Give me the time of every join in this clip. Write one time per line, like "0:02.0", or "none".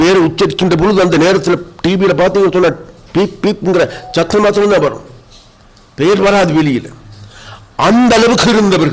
none